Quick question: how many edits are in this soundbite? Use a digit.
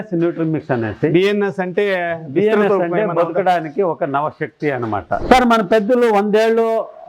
1